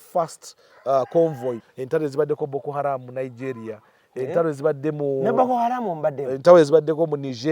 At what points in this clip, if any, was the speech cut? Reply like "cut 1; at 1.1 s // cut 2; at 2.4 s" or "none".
cut 1; at 1.7 s